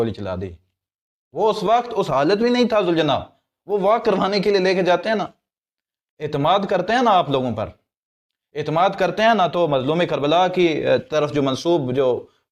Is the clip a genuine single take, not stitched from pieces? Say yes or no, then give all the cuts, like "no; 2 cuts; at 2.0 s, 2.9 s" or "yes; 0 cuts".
yes; 0 cuts